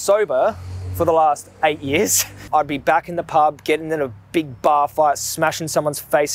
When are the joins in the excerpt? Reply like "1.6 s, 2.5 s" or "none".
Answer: 2.4 s